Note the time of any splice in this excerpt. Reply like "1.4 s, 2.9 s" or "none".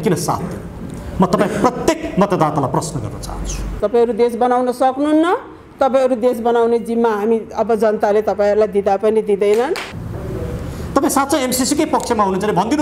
3.8 s, 9.9 s